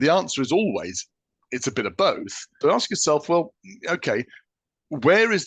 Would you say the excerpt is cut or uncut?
cut